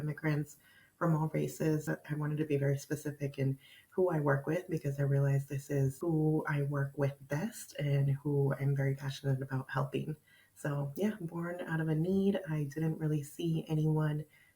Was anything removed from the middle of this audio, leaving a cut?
yes; 2 cuts; at 1.8 s, 6.0 s

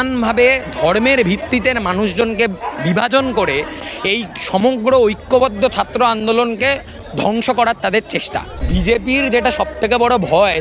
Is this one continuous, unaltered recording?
no; 1 cut; at 8.6 s

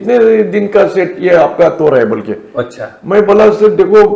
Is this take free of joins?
yes; 0 cuts

